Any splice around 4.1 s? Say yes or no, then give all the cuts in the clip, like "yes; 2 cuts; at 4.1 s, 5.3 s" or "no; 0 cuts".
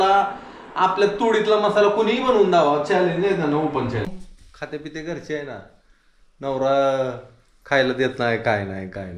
yes; 1 cut; at 4.1 s